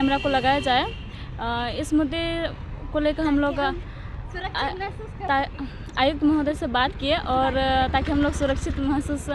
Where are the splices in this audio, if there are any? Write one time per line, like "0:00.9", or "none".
none